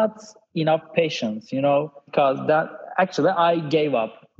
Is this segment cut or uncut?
cut